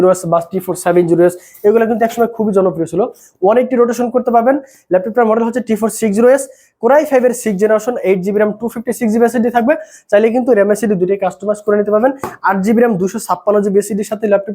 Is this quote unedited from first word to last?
yes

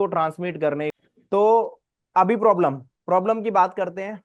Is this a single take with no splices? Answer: no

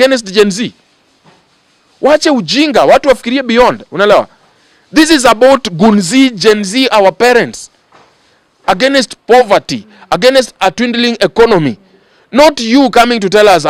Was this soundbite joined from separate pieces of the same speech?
no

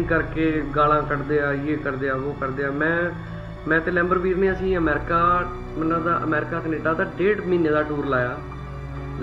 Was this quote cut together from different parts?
no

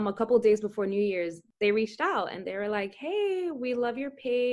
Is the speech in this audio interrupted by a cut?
yes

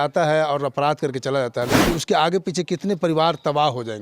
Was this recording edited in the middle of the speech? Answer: yes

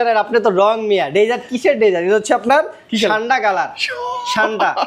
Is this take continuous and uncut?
yes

